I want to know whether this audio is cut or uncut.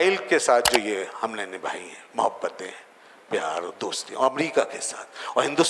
uncut